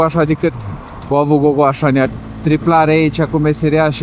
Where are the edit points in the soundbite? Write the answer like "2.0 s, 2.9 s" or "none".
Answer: 2.1 s